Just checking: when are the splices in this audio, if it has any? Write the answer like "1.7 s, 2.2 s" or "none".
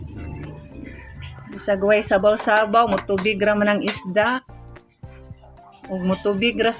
none